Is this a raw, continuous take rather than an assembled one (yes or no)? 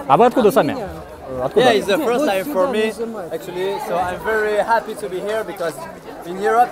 no